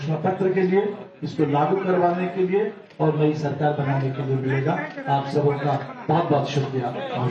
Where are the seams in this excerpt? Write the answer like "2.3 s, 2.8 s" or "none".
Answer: none